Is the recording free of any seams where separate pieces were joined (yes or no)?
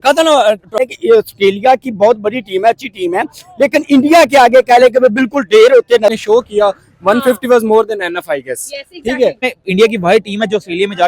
no